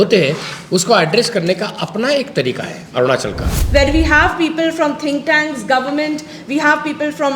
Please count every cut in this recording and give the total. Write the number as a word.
one